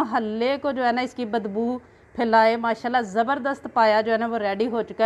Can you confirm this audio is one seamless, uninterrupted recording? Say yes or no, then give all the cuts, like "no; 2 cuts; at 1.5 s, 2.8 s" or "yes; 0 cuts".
yes; 0 cuts